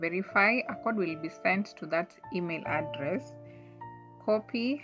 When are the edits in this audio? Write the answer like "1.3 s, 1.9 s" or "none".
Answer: none

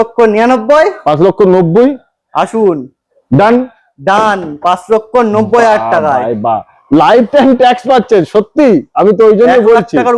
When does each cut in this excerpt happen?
none

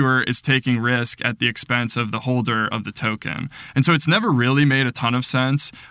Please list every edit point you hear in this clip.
none

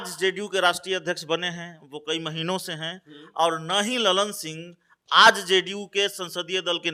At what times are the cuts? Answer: none

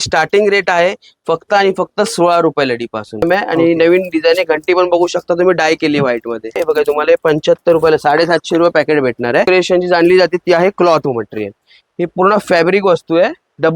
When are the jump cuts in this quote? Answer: 3.2 s, 6.6 s, 9.5 s

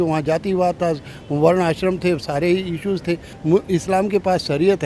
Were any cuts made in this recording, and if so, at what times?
3.3 s

